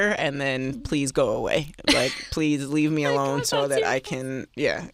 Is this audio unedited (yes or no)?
yes